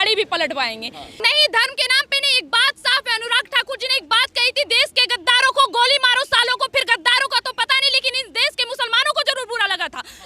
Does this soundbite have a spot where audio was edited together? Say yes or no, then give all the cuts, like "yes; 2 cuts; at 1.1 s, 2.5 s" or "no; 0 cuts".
yes; 1 cut; at 1.1 s